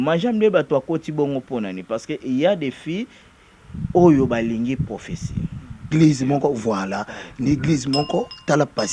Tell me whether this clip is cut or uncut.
cut